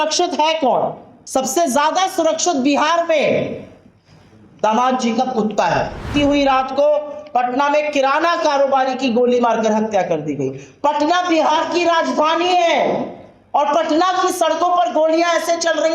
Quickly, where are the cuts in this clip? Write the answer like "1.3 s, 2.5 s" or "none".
6.1 s